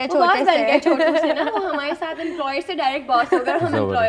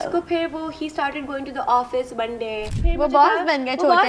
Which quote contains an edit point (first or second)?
second